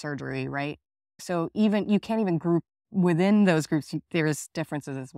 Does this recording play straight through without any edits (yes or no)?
yes